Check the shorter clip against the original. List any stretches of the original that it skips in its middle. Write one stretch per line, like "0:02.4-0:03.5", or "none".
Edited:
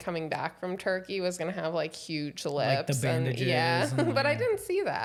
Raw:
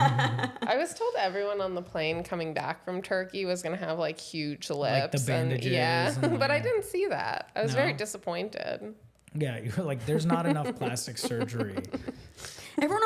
none